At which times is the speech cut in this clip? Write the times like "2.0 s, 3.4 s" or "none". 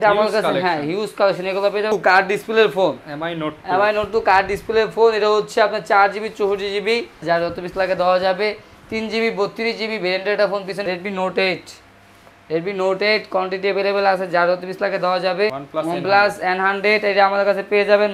1.9 s, 7.2 s, 10.8 s, 15.6 s